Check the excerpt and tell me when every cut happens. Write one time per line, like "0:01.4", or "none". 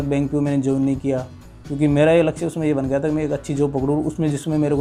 none